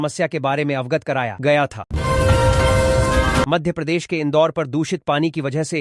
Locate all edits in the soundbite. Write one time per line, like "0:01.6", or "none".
0:01.8
0:03.5